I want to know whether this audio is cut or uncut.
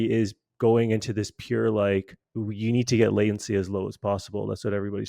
cut